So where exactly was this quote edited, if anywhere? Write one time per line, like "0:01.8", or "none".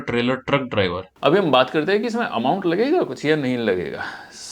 0:01.0